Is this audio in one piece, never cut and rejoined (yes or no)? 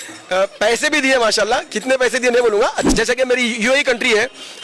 no